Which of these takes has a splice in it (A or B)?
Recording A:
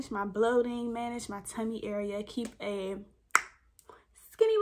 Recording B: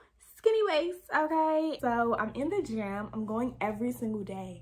B